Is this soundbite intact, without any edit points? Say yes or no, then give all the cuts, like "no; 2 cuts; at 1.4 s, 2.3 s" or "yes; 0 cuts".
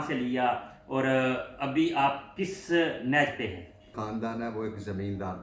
no; 1 cut; at 4.0 s